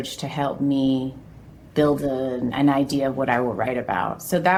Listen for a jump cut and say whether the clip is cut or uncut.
uncut